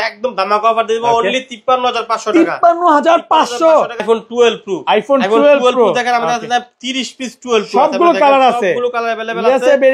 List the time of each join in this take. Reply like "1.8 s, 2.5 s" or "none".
4.0 s